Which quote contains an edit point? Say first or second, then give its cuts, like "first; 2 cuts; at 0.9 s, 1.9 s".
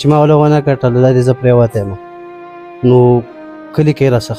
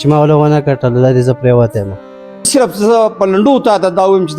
second; 1 cut; at 2.5 s